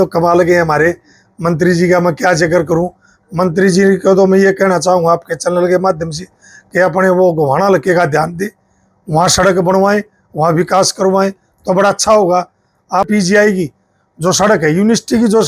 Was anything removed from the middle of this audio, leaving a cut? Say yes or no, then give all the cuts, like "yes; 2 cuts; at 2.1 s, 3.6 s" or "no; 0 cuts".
yes; 1 cut; at 13.1 s